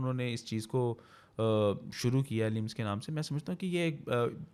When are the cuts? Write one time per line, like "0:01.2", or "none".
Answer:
none